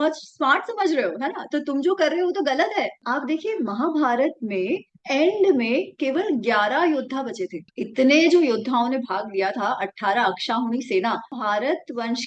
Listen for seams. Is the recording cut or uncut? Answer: cut